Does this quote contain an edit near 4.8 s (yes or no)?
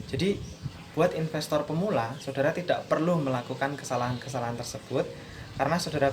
no